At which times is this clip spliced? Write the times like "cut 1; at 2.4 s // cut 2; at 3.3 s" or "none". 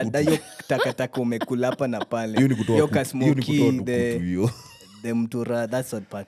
none